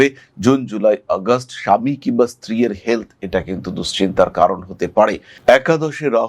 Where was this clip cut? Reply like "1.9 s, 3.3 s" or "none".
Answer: none